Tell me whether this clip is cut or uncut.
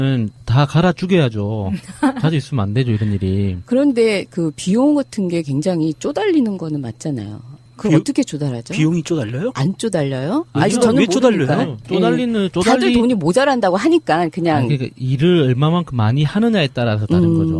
cut